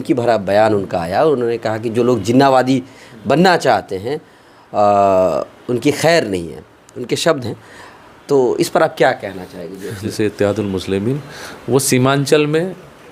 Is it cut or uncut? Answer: cut